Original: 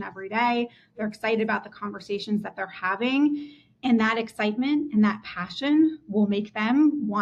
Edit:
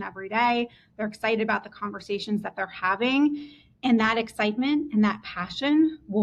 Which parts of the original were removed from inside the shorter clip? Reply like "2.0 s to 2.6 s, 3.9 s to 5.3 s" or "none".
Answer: none